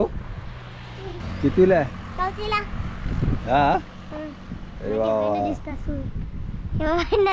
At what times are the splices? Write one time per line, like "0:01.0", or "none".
0:01.2